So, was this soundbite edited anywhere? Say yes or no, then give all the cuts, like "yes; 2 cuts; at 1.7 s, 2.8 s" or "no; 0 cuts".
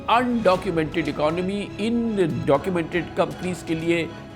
no; 0 cuts